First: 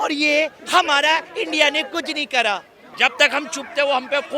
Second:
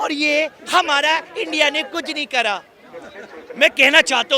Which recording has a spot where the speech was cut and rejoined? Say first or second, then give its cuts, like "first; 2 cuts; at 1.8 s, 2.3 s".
first; 1 cut; at 2.9 s